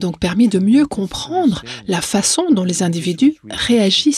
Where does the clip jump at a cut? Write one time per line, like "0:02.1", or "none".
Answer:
none